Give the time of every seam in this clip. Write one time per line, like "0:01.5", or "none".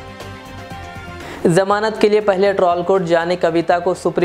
0:01.2